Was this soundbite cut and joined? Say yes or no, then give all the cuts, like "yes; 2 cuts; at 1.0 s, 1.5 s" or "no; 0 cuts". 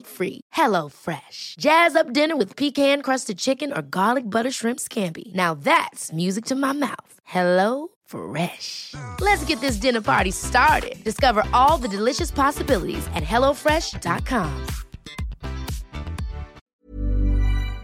yes; 1 cut; at 16.6 s